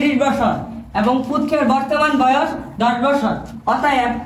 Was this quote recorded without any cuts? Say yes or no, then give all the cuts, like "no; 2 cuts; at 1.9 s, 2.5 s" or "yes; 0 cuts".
yes; 0 cuts